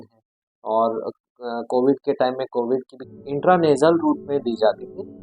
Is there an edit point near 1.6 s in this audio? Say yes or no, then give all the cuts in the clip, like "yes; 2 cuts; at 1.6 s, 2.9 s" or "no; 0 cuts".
no; 1 cut; at 3.1 s